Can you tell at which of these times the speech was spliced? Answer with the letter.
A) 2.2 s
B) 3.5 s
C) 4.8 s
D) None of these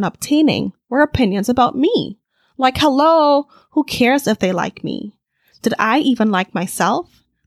D